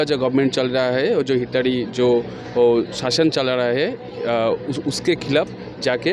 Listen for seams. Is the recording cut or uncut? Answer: uncut